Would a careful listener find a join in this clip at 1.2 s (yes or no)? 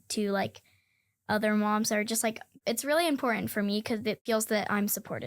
no